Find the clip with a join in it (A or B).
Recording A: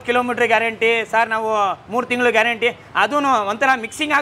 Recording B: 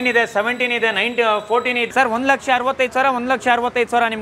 B